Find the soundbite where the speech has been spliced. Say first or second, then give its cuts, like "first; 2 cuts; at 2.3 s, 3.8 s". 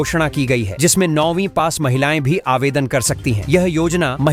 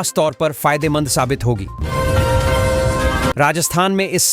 second; 2 cuts; at 1.7 s, 3.3 s